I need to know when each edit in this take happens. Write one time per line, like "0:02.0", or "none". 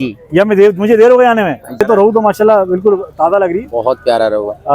0:01.8